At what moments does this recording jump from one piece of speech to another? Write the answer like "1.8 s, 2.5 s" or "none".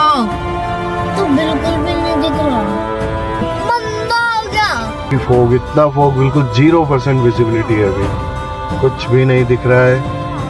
3.4 s, 5.1 s